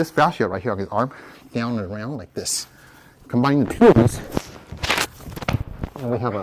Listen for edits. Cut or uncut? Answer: uncut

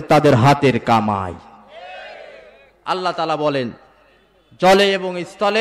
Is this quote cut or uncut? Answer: uncut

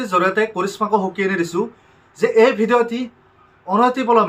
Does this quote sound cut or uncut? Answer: uncut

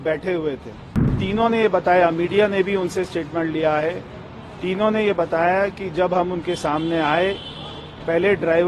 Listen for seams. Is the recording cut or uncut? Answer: cut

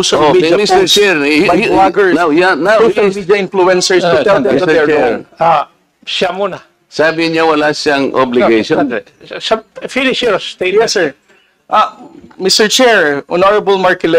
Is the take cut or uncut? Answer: uncut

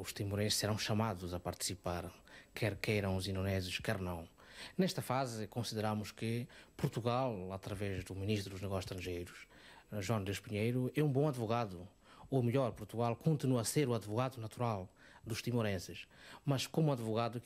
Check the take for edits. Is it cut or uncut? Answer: uncut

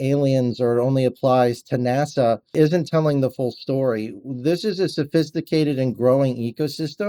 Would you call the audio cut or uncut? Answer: uncut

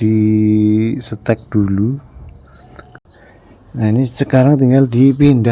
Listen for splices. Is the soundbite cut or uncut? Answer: cut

